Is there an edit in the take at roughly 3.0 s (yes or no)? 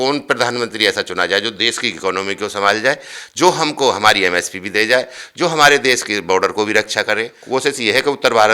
no